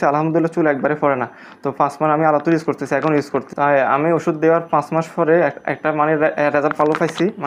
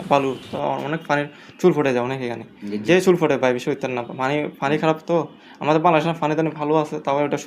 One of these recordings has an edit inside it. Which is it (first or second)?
second